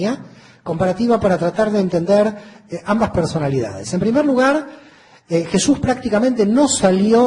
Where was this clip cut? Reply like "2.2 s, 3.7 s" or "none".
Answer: 1.7 s